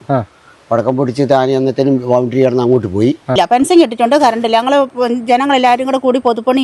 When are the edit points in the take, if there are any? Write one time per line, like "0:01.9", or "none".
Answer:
0:03.3